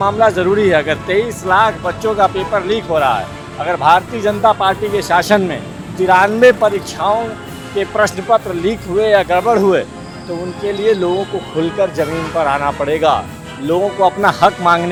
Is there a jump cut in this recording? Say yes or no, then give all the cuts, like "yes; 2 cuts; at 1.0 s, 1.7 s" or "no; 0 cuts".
no; 0 cuts